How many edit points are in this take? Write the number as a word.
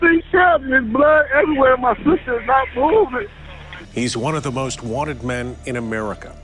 one